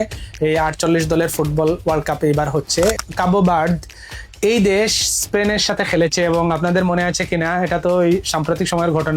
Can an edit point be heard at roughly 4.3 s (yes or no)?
no